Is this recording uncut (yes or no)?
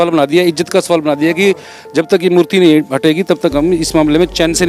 yes